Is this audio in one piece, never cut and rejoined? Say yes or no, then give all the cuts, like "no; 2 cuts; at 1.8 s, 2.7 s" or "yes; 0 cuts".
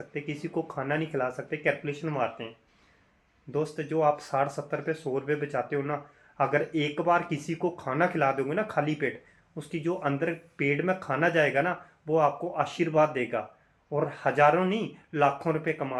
yes; 0 cuts